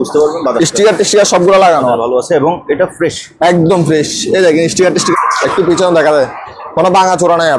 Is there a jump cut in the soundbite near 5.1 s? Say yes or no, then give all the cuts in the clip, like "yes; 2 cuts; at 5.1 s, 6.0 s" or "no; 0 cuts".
yes; 1 cut; at 5.1 s